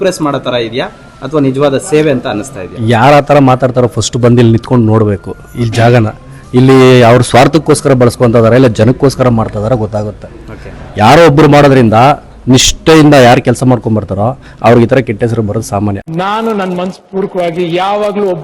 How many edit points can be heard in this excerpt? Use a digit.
1